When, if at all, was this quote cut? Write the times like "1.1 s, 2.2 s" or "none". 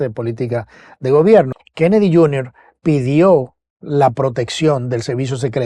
1.5 s